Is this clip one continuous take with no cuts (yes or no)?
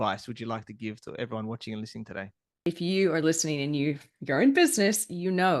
no